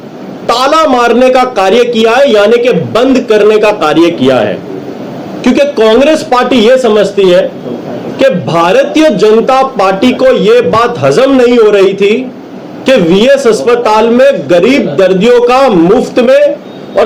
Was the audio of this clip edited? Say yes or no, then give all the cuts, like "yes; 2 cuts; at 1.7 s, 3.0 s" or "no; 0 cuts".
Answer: no; 0 cuts